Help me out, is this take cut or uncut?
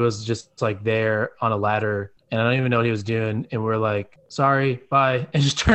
cut